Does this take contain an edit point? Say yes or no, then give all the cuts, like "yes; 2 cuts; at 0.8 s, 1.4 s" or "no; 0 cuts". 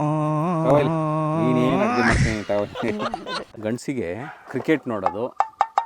yes; 2 cuts; at 3.5 s, 4.4 s